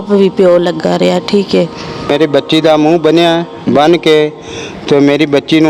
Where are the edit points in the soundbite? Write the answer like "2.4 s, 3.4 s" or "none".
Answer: 2.1 s